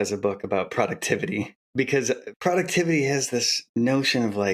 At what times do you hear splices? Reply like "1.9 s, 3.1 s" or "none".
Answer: 2.2 s, 3.6 s